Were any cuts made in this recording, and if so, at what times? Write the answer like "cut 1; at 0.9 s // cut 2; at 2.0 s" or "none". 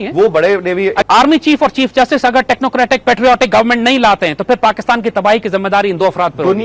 cut 1; at 1.0 s